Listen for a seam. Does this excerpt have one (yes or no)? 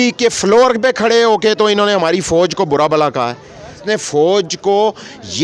yes